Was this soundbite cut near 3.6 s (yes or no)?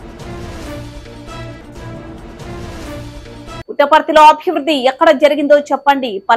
yes